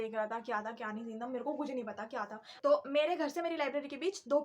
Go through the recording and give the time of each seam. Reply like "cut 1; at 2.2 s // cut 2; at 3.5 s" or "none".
cut 1; at 2.4 s